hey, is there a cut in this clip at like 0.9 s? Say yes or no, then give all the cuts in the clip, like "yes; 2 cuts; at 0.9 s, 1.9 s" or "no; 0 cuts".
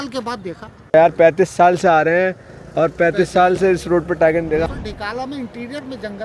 yes; 2 cuts; at 0.9 s, 4.6 s